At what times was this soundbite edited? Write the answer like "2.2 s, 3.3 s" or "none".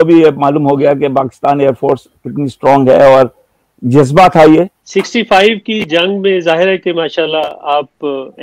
4.8 s

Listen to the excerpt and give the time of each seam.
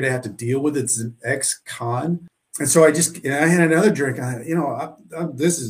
2.4 s

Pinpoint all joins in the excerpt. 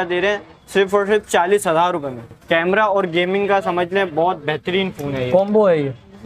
2.3 s

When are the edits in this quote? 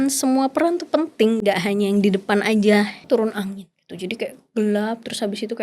1.4 s, 3.0 s

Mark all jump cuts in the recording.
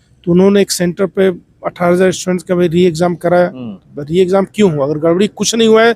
none

